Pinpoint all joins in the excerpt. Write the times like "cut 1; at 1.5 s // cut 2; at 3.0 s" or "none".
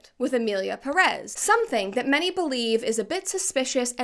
cut 1; at 1.2 s